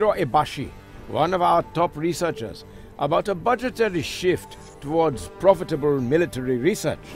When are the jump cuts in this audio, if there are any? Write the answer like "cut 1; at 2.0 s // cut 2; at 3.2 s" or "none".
cut 1; at 1.4 s